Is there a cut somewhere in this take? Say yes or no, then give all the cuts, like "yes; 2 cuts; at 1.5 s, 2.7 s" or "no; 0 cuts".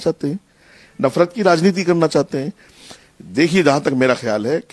no; 0 cuts